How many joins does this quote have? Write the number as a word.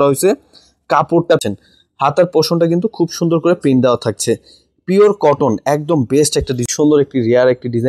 two